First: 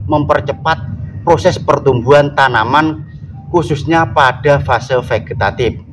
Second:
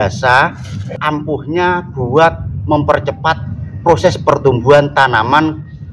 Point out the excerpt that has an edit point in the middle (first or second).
second